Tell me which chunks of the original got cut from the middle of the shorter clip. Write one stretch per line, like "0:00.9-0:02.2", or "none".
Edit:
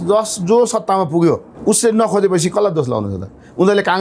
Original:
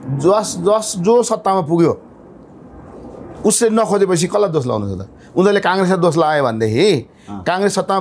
0:02.1-0:03.3